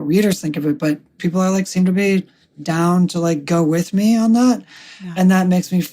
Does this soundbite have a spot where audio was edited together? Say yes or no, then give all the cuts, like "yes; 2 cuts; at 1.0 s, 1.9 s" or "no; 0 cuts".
yes; 1 cut; at 1.2 s